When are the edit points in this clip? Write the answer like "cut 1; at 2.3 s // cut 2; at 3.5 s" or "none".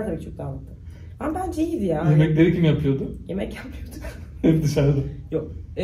none